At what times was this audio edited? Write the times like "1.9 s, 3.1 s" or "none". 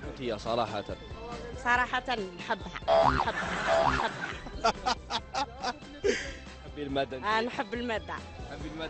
none

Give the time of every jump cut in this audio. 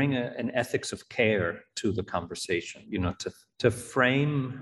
3.2 s

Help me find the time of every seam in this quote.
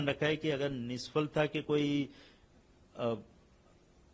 none

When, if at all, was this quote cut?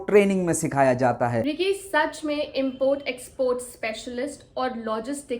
1.5 s

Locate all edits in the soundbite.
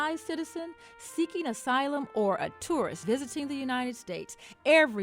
3.0 s

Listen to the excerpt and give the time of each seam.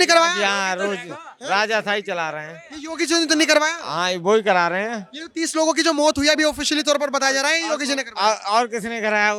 none

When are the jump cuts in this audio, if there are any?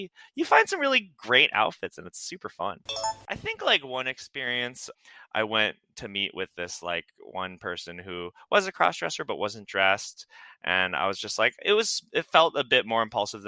3.1 s

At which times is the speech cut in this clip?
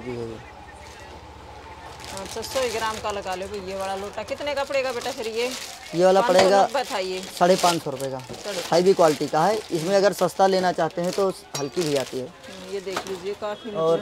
none

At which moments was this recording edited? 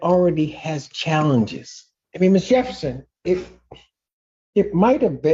none

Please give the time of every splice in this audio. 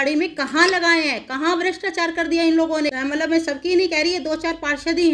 2.9 s

